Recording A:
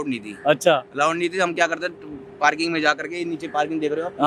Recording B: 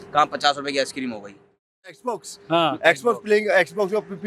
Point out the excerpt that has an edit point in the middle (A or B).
B